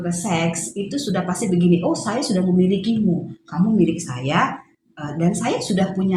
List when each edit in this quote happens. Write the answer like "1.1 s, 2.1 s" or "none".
none

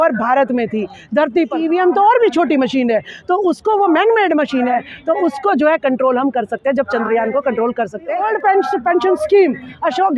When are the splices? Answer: 1.6 s, 8.2 s

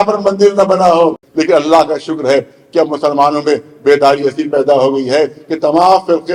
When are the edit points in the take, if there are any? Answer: 1.2 s

